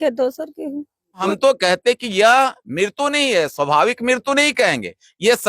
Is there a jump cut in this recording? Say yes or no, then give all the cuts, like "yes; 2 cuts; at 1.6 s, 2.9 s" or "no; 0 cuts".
yes; 1 cut; at 1.3 s